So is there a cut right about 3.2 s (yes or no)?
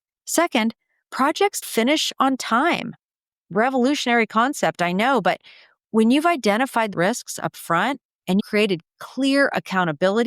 no